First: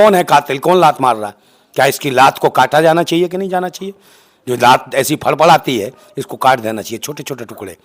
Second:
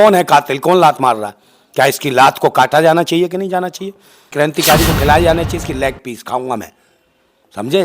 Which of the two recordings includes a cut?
second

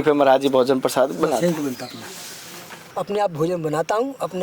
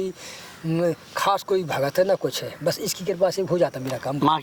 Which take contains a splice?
first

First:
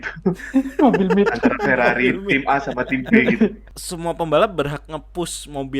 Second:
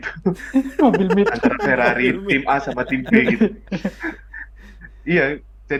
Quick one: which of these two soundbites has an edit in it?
first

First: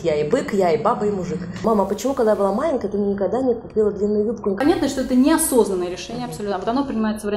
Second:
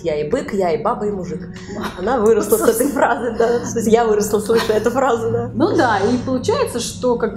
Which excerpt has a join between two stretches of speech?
first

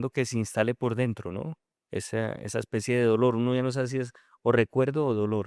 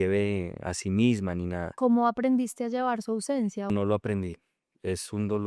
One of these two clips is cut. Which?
second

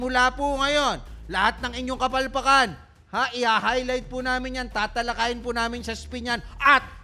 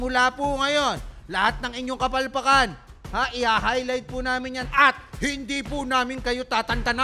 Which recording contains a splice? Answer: second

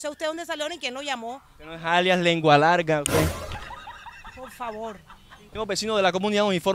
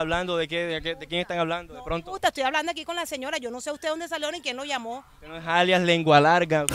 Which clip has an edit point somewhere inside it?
first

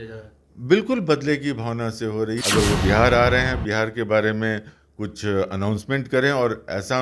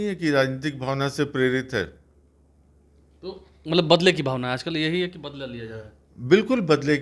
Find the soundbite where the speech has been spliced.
first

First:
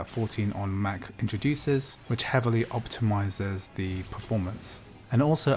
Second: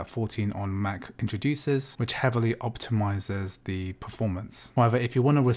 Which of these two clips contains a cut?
second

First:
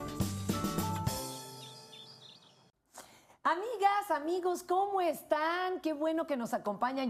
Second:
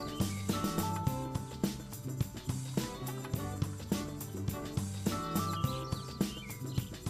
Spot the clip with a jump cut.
second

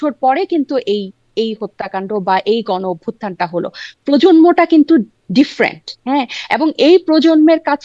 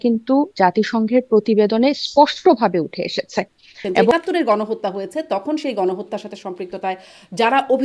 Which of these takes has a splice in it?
second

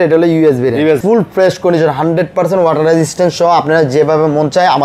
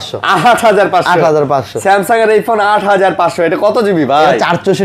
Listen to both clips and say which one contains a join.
first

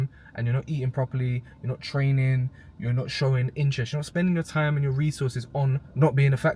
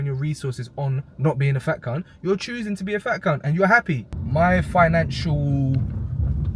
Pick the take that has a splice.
second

